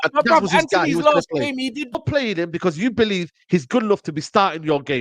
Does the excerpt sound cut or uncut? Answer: cut